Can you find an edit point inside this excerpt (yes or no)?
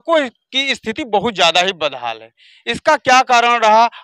no